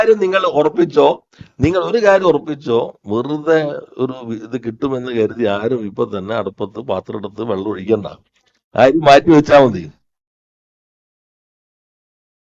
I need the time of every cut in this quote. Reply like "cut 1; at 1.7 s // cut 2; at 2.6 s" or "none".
none